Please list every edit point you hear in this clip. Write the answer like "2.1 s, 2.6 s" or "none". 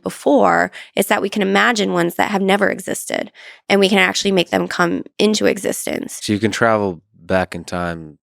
6.2 s